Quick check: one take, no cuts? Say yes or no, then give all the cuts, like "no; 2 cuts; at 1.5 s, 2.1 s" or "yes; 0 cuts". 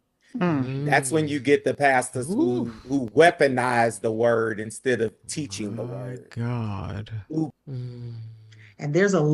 no; 1 cut; at 7.5 s